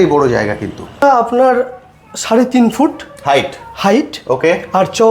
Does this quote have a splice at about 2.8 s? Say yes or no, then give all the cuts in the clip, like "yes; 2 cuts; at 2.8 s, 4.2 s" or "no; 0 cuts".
no; 1 cut; at 1.0 s